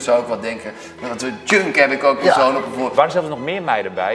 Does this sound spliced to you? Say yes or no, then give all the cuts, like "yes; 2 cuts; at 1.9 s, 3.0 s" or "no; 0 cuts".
yes; 1 cut; at 2.9 s